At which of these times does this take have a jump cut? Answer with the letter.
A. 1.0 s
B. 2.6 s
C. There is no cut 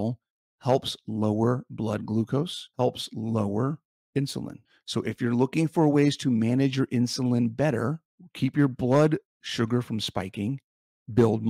B